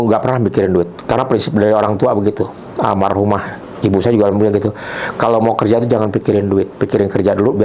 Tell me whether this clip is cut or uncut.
uncut